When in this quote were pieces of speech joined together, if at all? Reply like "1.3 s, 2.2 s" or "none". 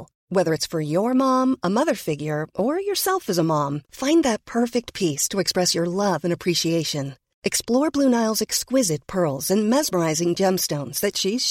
none